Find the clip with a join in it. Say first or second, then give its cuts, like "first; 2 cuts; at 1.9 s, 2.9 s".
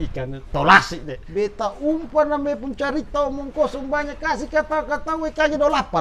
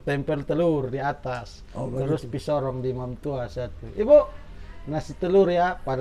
first; 1 cut; at 1.2 s